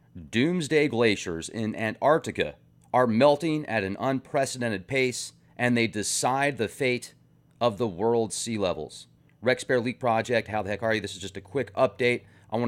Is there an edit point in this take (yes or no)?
no